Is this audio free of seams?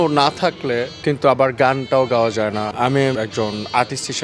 no; 1 cut; at 3.1 s

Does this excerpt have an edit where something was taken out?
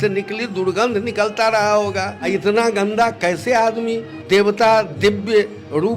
yes; 2 cuts; at 2.2 s, 4.1 s

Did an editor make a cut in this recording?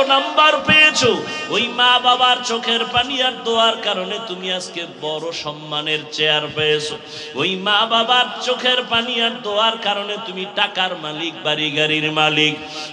no; 0 cuts

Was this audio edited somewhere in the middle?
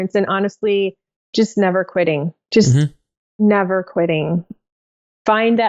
yes; 1 cut; at 4.6 s

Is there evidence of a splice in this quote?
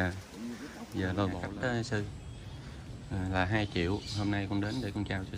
yes; 1 cut; at 1.4 s

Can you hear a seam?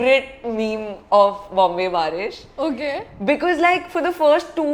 no; 0 cuts

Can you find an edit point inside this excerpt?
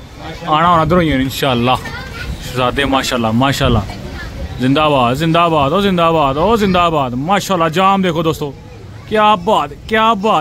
no; 0 cuts

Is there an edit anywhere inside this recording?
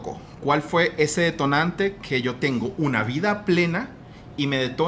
no; 0 cuts

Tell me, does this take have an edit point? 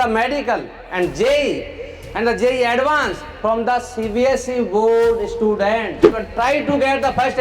yes; 1 cut; at 6.2 s

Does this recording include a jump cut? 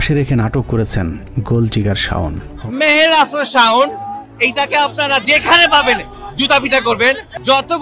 yes; 1 cut; at 2.5 s

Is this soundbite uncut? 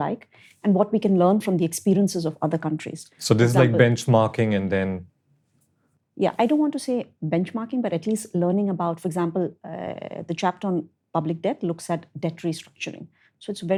yes; 0 cuts

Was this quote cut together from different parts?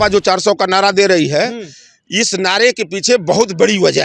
no; 0 cuts

